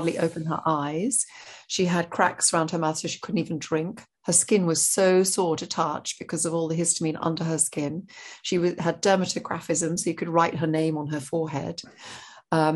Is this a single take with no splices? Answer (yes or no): yes